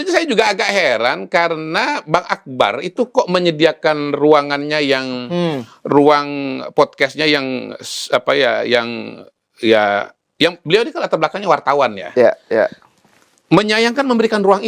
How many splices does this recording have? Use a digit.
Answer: 0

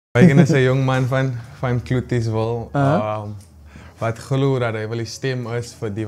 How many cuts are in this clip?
0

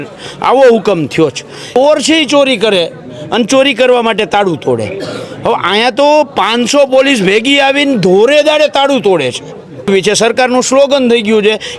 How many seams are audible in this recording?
2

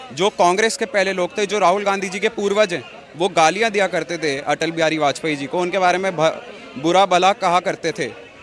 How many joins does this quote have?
0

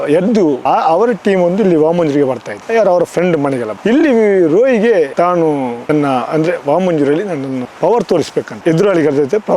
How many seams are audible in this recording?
1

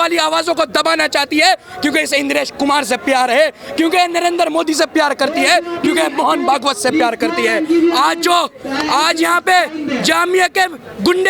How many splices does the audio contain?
0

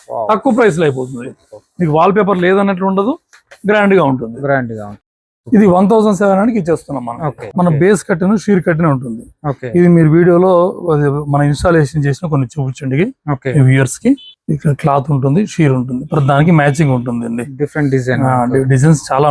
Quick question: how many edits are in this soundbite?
2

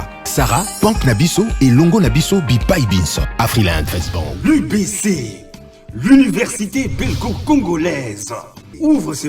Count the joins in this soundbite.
1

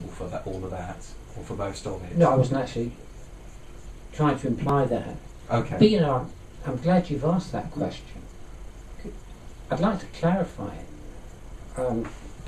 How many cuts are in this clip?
1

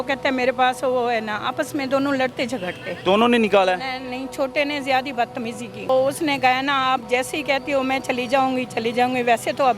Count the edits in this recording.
2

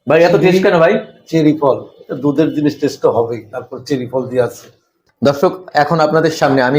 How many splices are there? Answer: 1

